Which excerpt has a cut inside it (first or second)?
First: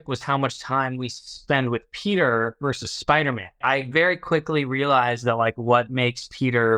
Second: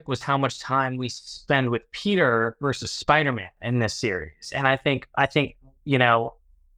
first